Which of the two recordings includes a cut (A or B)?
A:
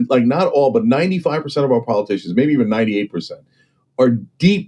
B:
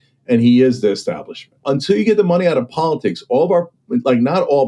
B